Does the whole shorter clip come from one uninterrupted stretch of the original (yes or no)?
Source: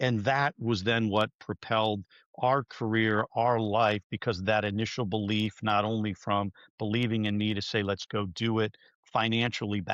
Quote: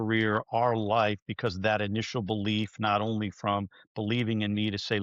yes